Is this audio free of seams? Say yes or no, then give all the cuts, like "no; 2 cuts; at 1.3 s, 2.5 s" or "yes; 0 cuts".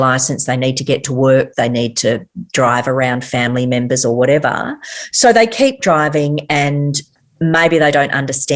yes; 0 cuts